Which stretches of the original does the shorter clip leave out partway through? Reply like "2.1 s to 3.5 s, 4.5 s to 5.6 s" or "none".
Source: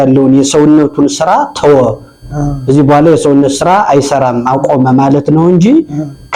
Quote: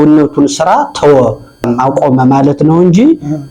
2.3 s to 4.3 s